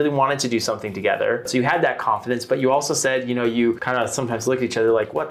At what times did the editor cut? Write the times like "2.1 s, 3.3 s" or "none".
1.5 s, 3.8 s